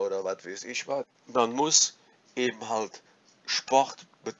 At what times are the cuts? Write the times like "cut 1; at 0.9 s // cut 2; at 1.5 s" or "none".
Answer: cut 1; at 1.2 s